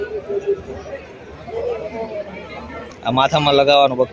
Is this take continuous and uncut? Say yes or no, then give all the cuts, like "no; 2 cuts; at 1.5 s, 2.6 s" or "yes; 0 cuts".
no; 1 cut; at 2.9 s